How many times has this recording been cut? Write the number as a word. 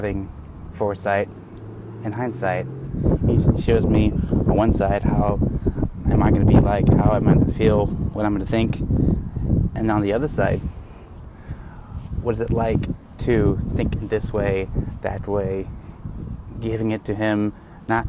one